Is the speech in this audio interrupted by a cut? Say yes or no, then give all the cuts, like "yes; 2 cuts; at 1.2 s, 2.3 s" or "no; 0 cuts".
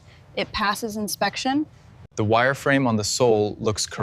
yes; 1 cut; at 2.1 s